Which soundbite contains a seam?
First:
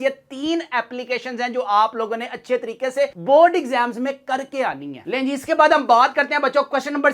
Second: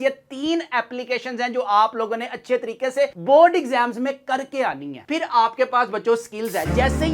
second; 1 cut; at 5.0 s

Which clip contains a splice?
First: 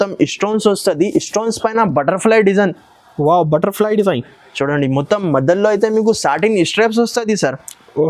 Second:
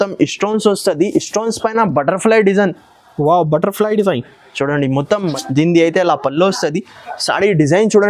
second; 1 cut; at 5.3 s

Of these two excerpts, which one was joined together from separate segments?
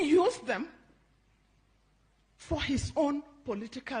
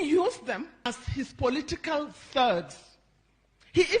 second; 1 cut; at 1.0 s

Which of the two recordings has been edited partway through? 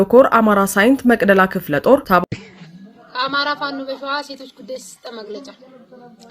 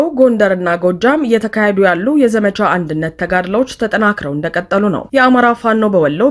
first; 1 cut; at 2.2 s

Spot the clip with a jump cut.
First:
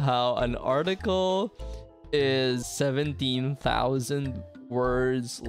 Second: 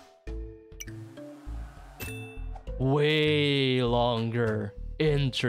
first; 1 cut; at 2.7 s

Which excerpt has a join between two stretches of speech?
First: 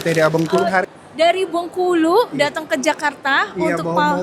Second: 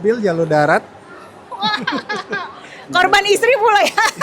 second; 1 cut; at 2.2 s

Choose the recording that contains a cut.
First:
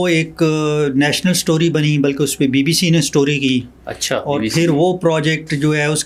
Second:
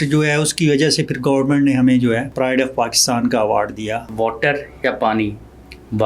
second; 2 cuts; at 2.3 s, 4.1 s

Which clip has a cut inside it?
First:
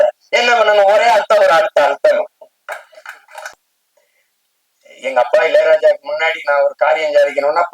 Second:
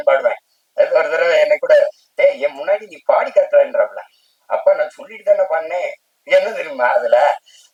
first; 1 cut; at 3.6 s

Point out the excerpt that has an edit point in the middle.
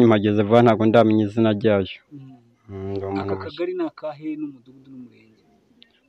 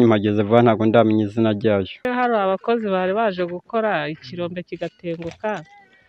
second; 1 cut; at 2.1 s

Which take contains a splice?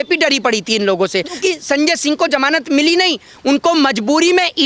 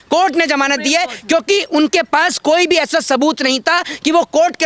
first; 1 cut; at 1.4 s

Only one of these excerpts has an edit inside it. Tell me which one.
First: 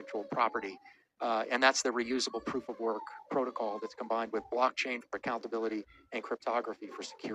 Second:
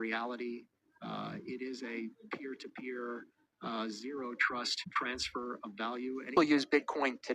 second; 1 cut; at 6.3 s

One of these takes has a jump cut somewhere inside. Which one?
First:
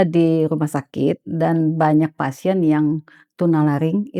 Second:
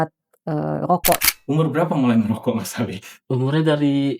second; 1 cut; at 1.2 s

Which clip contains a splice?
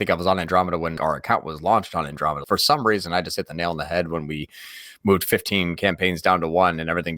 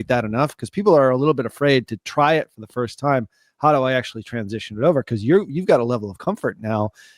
first; 2 cuts; at 1.0 s, 2.4 s

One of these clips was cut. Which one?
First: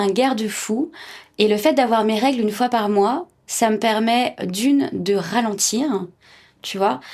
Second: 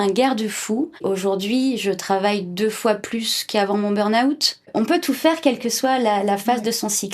second; 2 cuts; at 1.0 s, 4.7 s

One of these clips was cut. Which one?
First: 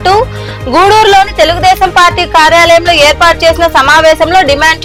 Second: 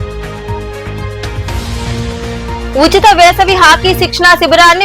second; 1 cut; at 1.3 s

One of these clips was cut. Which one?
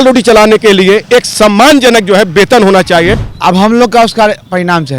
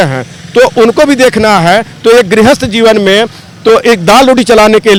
first; 1 cut; at 3.3 s

